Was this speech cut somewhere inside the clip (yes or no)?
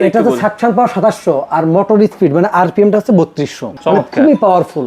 yes